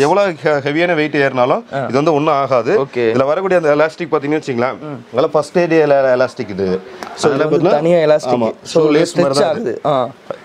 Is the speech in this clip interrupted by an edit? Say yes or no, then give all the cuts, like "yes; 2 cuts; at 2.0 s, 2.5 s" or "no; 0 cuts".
no; 0 cuts